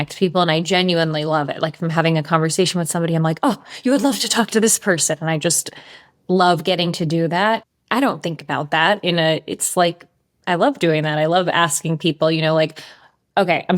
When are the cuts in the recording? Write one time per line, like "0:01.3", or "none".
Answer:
0:07.6